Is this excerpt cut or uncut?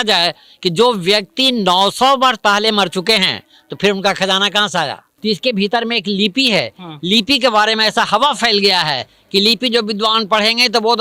cut